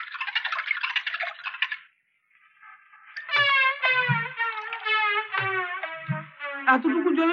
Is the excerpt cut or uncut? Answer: uncut